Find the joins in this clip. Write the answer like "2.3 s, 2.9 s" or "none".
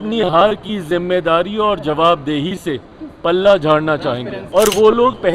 4.3 s